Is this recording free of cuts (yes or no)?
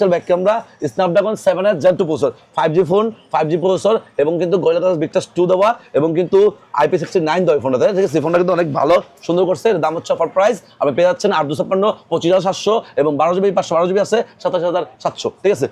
yes